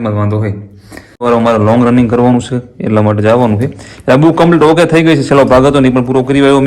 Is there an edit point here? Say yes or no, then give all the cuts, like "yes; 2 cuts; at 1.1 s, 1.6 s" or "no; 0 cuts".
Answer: yes; 1 cut; at 1.2 s